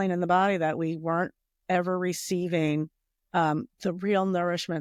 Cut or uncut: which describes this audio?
uncut